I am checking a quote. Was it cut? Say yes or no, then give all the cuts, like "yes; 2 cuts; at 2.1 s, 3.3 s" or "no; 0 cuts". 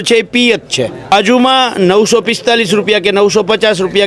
yes; 1 cut; at 1.1 s